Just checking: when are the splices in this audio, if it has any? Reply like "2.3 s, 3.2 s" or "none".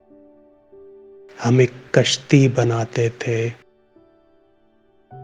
1.4 s